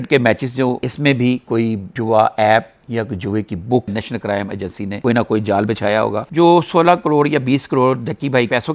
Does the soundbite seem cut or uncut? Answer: cut